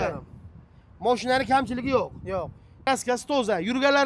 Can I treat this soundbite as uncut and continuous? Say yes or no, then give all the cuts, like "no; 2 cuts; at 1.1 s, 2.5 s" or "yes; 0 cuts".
no; 1 cut; at 2.8 s